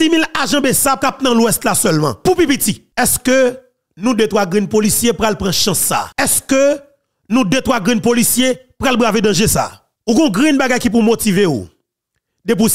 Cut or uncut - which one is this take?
cut